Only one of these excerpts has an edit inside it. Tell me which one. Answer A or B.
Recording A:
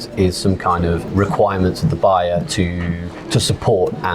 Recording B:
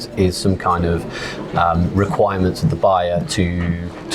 A